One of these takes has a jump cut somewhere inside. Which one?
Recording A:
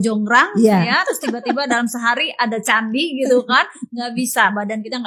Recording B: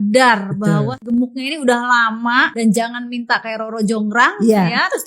B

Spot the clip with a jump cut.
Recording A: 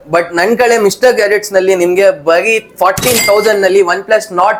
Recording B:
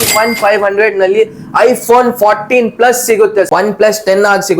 B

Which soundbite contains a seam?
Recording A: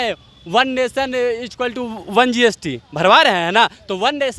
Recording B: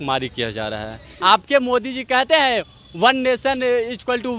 B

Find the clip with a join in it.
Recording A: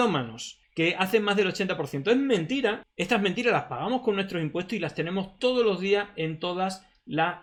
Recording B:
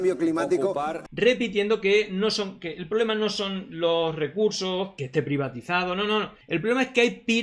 B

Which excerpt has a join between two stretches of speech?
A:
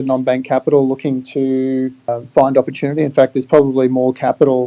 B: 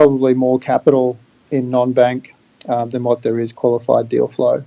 A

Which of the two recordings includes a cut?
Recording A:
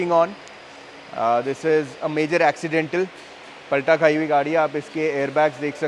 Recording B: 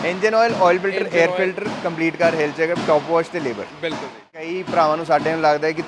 B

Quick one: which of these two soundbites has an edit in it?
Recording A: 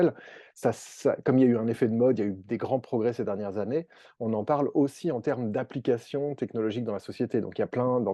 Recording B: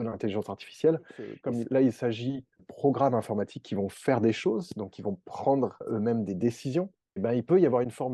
B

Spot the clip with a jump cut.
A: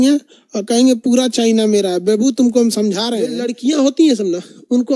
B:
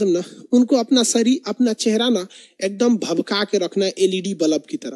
A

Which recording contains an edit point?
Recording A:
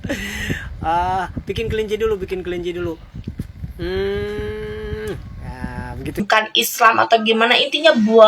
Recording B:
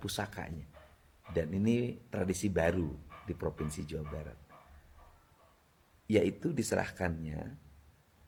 A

